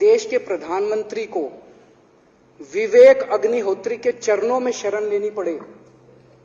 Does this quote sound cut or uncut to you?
uncut